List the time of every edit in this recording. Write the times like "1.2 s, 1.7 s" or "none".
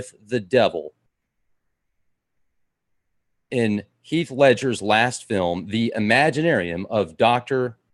none